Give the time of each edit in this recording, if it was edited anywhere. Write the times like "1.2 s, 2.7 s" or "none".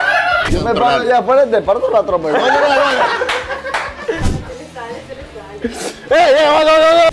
none